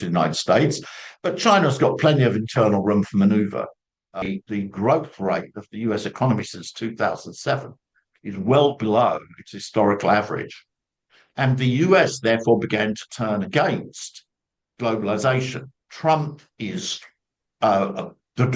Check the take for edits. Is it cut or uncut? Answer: cut